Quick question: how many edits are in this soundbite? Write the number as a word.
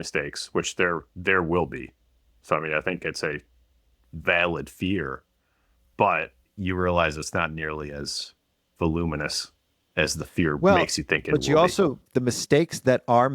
zero